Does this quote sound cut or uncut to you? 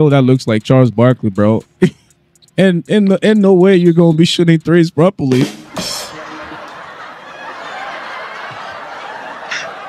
uncut